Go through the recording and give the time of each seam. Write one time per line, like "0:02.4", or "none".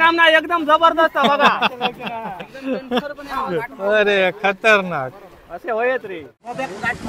none